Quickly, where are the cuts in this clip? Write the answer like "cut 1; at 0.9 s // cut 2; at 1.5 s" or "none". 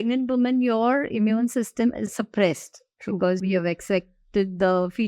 cut 1; at 2.1 s // cut 2; at 3.4 s